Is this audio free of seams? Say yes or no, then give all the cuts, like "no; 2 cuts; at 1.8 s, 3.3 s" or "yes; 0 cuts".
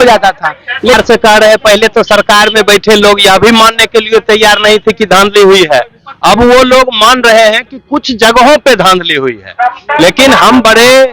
no; 1 cut; at 1.0 s